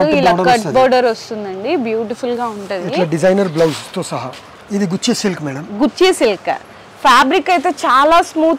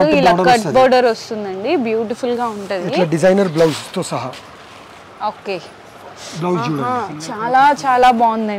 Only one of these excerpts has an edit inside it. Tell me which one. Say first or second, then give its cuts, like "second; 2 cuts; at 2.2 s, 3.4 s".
first; 1 cut; at 4.6 s